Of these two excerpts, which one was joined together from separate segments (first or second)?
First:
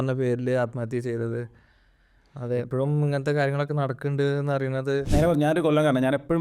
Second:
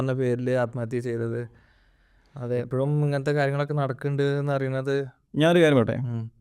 first